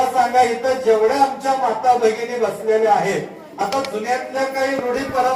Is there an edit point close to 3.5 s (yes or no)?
no